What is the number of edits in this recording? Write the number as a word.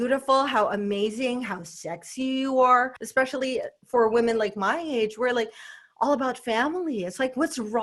one